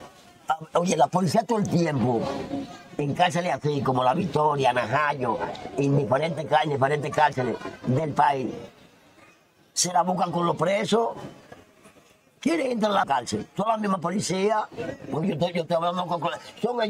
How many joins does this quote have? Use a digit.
1